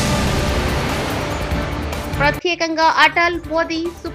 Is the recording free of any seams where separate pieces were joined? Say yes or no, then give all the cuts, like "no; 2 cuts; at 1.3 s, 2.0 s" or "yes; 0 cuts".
yes; 0 cuts